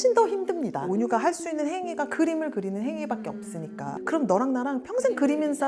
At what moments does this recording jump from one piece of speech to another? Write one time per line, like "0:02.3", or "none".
0:00.9
0:04.0